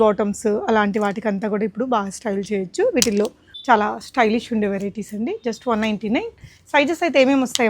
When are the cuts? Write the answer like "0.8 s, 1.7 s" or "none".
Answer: 3.5 s

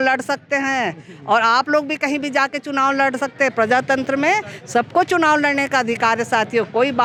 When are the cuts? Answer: none

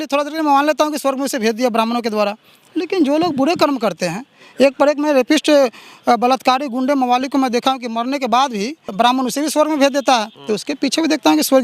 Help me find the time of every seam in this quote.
8.9 s, 10.3 s

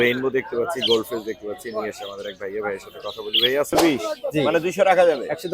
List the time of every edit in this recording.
3.8 s

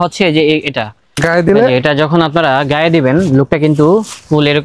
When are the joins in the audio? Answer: 1.2 s

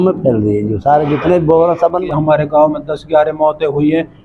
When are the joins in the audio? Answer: 2.0 s

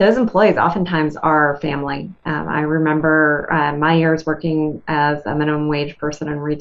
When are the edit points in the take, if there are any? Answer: none

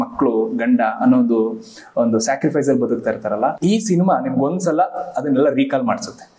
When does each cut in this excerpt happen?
3.6 s

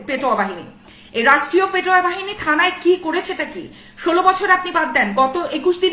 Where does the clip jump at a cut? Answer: none

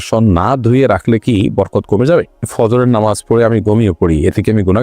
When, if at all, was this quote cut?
2.5 s

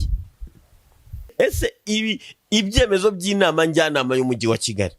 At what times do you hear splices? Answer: 1.3 s

